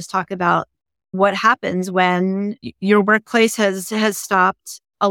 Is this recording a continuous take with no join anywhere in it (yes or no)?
no